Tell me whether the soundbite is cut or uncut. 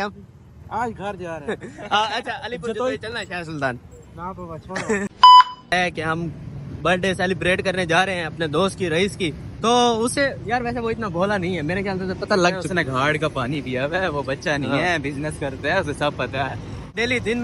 uncut